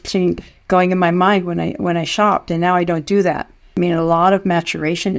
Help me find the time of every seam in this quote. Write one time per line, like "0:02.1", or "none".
0:03.6